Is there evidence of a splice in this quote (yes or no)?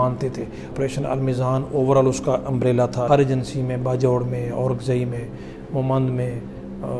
yes